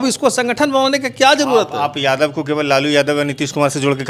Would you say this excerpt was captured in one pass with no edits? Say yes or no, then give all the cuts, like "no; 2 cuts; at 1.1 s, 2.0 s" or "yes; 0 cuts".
yes; 0 cuts